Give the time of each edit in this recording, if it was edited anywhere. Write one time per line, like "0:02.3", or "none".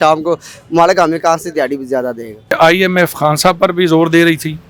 0:02.5

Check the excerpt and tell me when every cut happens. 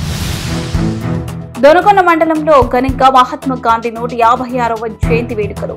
0:01.2

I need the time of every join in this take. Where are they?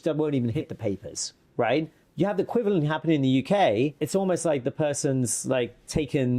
0:02.0
0:04.0

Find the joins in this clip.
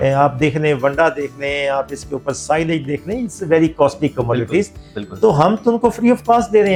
none

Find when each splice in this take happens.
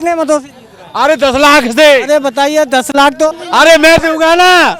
0:03.4

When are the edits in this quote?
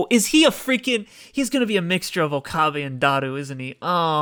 none

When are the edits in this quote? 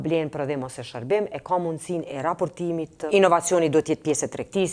0:03.0

